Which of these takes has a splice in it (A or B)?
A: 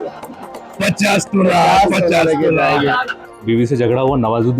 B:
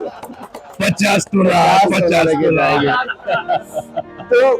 A